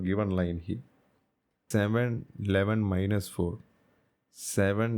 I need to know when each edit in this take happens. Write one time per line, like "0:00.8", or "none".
0:01.5